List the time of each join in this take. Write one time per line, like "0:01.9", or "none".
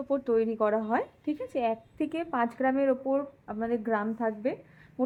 none